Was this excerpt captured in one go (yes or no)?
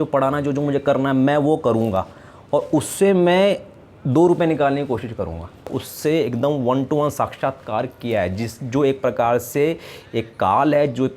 no